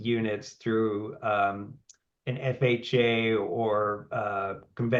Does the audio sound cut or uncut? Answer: uncut